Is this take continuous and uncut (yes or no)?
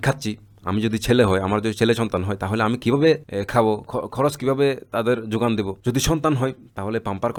yes